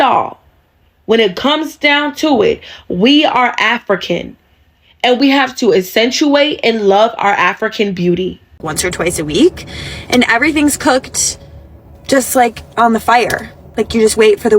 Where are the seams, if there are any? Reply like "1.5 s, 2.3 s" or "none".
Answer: 8.7 s